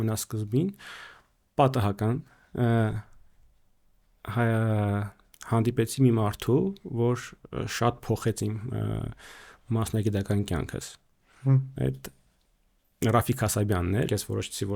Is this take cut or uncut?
cut